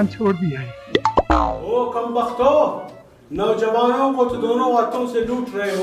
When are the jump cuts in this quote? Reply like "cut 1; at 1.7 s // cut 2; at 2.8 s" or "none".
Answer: cut 1; at 1.6 s